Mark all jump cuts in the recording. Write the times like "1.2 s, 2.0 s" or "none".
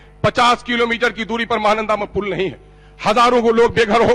none